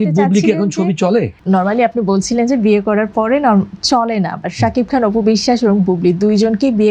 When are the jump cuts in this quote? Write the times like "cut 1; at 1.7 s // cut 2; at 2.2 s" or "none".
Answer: cut 1; at 1.4 s